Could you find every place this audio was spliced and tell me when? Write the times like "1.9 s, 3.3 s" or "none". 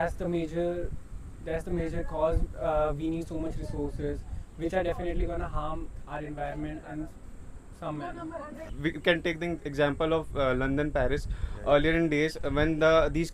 8.6 s